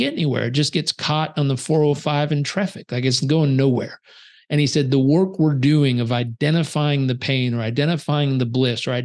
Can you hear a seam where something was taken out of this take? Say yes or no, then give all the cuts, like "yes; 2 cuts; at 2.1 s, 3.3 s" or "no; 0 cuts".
no; 0 cuts